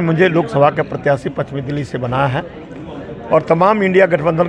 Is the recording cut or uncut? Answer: uncut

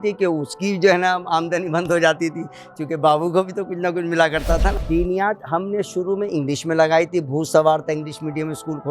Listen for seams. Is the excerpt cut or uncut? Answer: cut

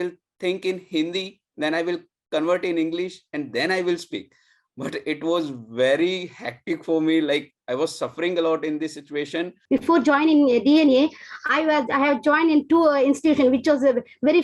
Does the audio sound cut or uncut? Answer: cut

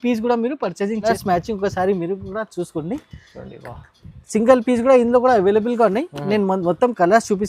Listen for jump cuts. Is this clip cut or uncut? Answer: cut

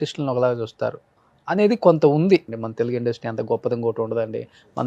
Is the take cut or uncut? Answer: cut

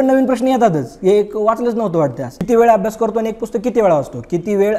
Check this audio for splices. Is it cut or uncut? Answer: cut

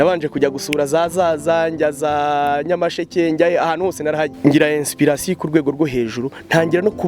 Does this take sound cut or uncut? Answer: cut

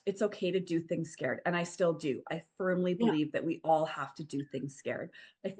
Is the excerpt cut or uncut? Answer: uncut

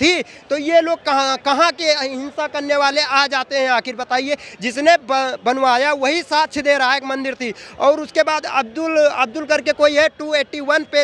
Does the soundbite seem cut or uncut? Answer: uncut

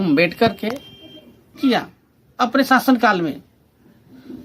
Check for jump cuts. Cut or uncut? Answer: cut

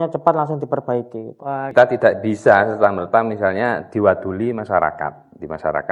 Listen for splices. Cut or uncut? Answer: cut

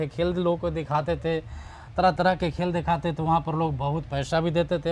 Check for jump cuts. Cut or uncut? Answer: uncut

